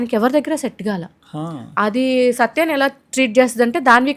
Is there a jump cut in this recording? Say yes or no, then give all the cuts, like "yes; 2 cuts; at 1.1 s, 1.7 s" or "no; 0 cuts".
no; 0 cuts